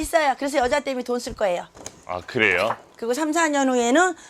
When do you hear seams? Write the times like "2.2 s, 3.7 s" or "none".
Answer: 2.8 s

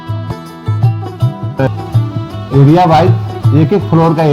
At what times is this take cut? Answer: none

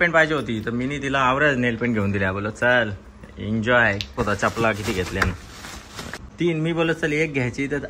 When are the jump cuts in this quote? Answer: 4.1 s, 6.2 s

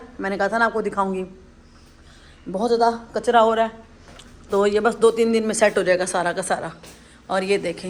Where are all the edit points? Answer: none

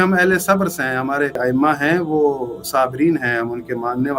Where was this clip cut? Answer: 1.4 s

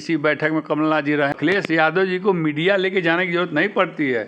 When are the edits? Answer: 1.3 s

